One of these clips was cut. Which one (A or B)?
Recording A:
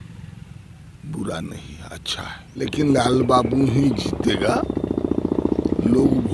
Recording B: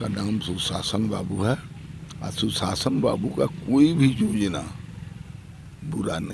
A